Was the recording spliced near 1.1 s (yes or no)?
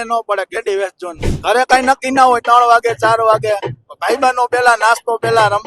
yes